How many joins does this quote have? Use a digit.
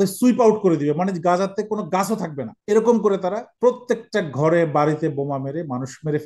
2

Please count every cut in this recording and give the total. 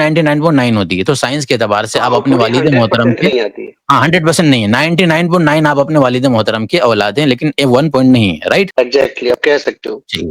1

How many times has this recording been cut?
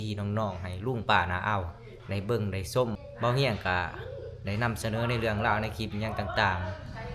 1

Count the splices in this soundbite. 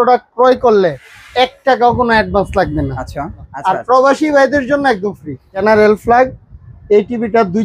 2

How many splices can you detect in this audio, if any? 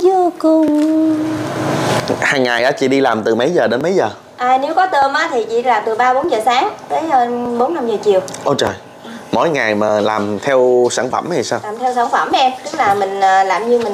1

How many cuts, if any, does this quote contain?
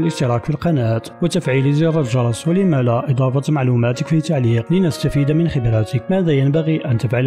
3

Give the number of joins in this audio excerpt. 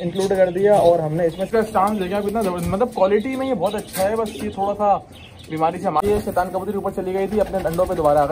2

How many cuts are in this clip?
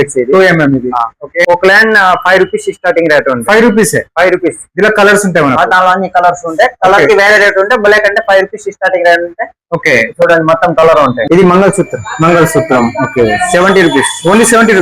2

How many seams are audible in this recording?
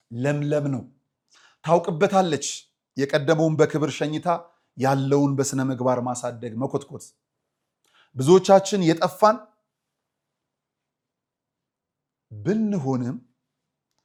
0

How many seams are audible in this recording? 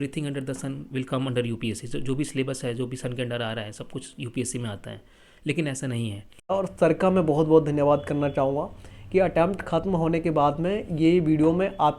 1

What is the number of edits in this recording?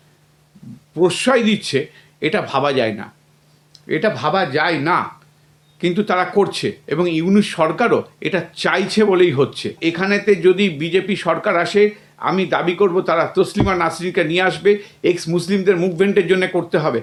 0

